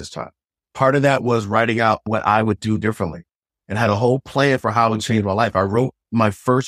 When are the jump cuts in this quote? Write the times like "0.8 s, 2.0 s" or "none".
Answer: 2.0 s